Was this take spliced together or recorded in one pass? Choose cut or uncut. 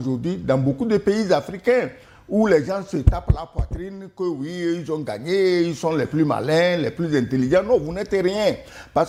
uncut